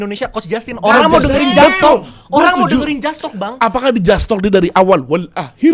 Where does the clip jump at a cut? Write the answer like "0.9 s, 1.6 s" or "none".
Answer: none